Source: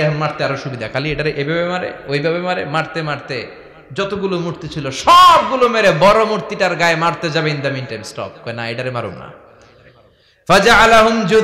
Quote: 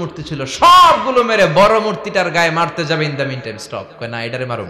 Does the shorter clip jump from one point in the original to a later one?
no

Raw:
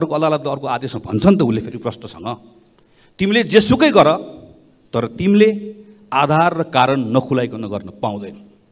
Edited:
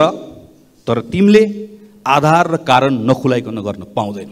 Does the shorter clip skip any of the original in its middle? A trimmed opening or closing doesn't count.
no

